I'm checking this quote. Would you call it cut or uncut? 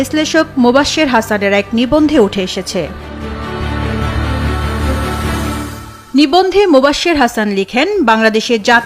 uncut